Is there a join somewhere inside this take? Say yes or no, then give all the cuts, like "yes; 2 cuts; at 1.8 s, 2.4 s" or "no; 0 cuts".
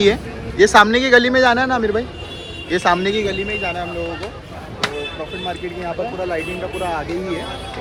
no; 0 cuts